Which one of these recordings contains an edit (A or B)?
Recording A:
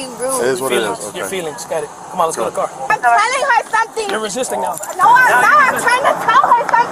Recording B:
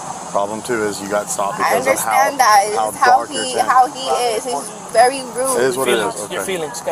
A